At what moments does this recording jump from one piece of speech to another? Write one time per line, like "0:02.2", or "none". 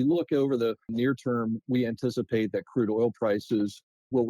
0:00.9